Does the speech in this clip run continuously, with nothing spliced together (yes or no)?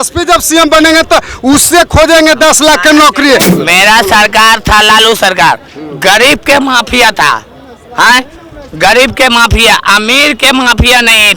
no